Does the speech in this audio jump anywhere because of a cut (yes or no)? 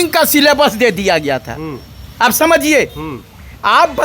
no